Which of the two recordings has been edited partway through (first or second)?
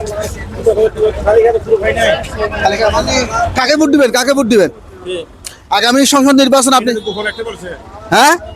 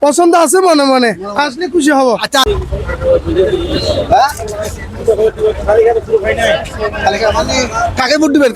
second